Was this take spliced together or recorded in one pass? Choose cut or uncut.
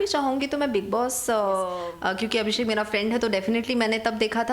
cut